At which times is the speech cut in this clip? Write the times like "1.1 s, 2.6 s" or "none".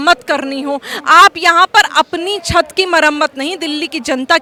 none